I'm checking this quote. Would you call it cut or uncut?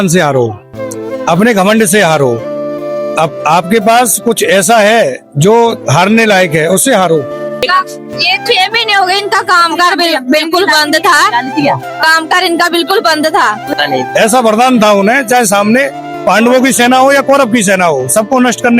cut